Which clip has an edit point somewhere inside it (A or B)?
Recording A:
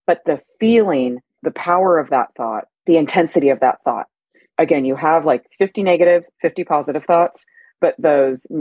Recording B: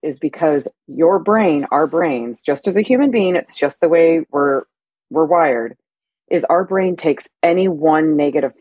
A